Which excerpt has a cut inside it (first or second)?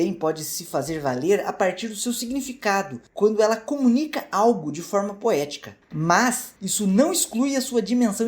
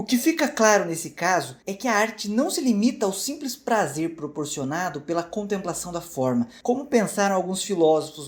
first